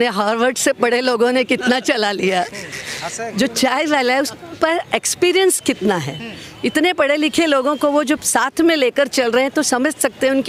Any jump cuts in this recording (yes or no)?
no